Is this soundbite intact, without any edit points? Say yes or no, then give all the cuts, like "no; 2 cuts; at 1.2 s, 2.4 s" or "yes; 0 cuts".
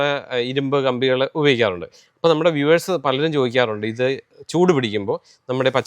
yes; 0 cuts